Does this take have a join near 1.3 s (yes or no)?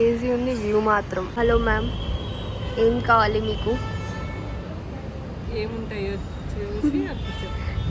yes